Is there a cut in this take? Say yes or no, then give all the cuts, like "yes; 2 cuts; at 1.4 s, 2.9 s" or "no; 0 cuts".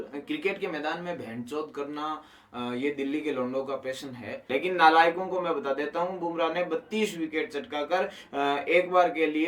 yes; 1 cut; at 4.4 s